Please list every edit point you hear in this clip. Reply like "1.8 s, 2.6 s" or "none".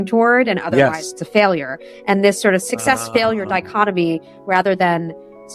2.6 s